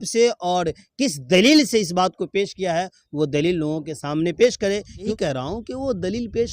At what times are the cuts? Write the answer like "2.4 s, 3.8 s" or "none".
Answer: 5.1 s